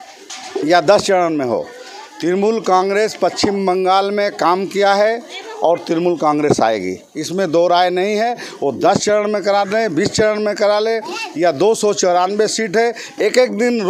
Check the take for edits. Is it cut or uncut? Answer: uncut